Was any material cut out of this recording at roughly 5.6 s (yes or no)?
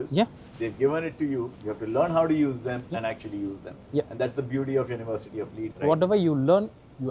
yes